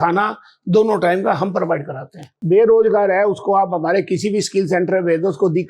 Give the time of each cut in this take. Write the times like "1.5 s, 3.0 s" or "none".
2.4 s